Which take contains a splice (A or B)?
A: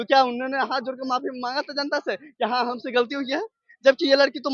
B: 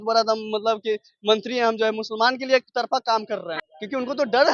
B